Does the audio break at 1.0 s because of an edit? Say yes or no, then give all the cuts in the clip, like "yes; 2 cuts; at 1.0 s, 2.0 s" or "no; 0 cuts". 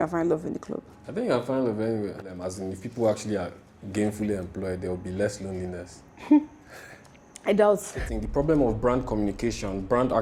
no; 2 cuts; at 2.3 s, 8.1 s